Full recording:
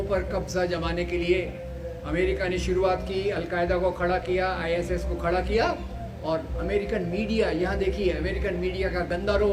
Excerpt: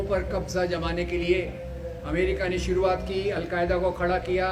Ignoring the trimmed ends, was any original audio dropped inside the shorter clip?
no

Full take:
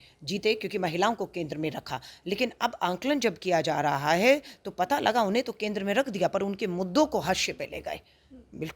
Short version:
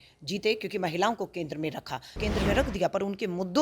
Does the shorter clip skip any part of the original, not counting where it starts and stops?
yes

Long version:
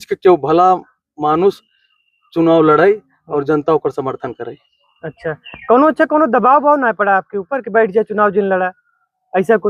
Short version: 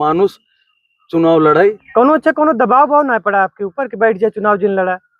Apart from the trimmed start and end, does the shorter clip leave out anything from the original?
yes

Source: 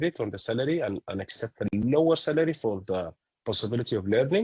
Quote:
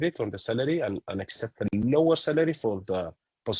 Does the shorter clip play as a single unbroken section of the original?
yes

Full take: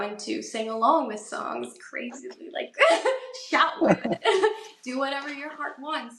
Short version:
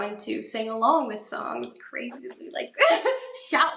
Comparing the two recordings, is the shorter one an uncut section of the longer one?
yes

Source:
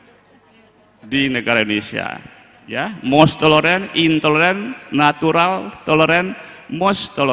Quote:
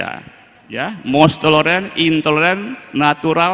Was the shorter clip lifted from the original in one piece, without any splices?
yes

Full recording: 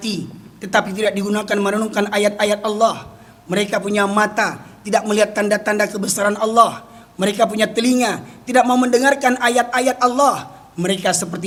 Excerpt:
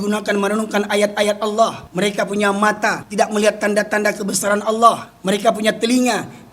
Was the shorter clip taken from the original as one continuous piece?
no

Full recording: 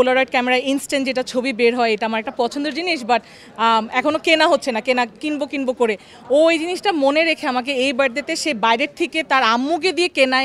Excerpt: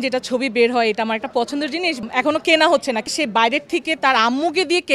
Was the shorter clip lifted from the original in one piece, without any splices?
no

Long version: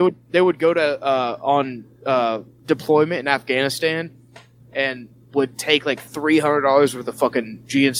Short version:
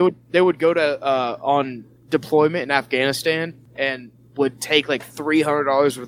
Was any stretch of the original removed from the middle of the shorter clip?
yes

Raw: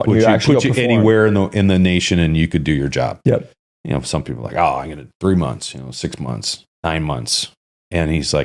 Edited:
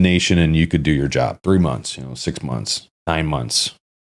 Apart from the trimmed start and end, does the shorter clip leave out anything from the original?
yes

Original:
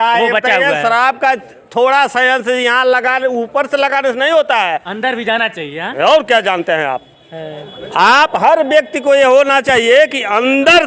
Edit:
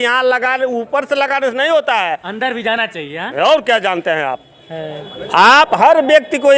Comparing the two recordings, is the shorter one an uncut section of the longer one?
yes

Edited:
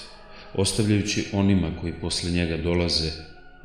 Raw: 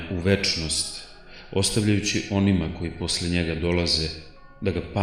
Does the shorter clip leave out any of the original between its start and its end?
no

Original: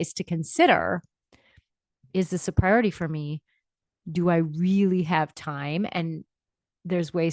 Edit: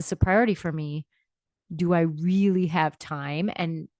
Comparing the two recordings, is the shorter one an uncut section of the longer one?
yes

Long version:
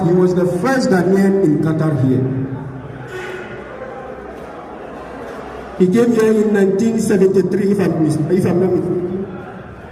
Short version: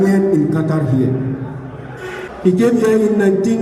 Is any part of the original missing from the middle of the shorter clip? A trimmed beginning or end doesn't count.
yes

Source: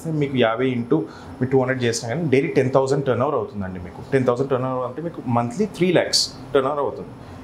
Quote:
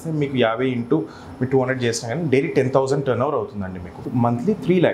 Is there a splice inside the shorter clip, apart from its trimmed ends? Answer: yes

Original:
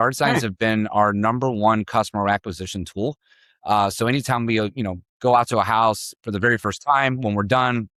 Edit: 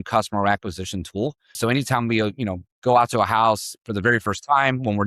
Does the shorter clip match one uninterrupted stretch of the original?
no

